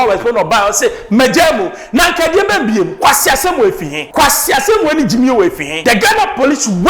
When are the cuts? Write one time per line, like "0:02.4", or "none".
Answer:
0:03.9
0:05.7